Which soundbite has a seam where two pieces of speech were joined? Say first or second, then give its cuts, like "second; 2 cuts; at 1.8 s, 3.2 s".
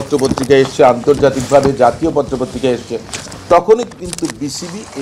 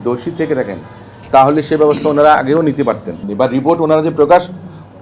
second; 1 cut; at 3.2 s